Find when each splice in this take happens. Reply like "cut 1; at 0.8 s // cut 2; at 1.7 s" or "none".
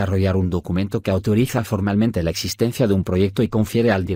none